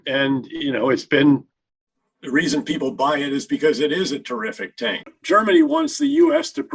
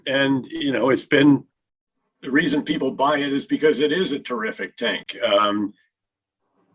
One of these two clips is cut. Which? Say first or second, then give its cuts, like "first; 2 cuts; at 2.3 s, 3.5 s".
first; 1 cut; at 5.1 s